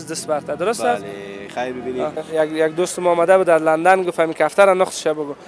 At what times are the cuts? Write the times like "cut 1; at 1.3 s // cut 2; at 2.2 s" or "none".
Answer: cut 1; at 2.3 s